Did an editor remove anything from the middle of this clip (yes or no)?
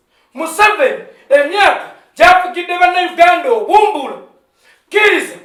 no